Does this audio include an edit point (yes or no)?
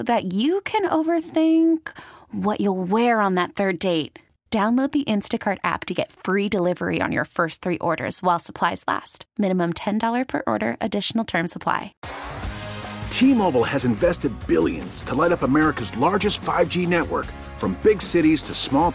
yes